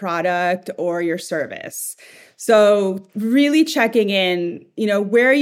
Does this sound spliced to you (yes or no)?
no